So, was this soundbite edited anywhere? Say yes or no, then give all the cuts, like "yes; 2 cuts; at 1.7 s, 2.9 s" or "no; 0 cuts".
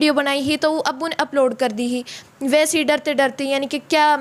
no; 0 cuts